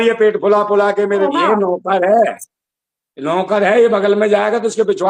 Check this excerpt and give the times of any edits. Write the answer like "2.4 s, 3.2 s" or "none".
1.3 s